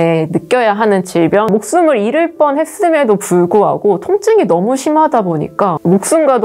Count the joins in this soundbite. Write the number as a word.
one